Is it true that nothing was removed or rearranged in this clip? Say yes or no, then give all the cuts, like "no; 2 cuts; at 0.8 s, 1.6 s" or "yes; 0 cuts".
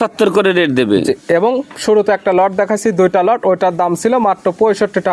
yes; 0 cuts